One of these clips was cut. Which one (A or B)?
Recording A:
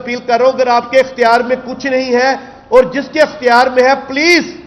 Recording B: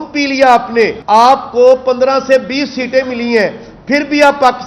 B